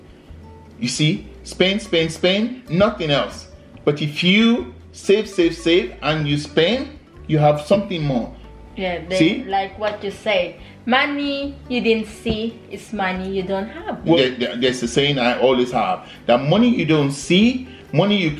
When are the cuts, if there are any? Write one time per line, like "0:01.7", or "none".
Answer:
0:14.2